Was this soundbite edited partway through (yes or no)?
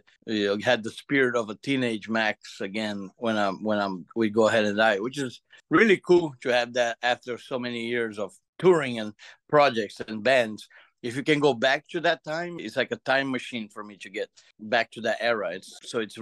yes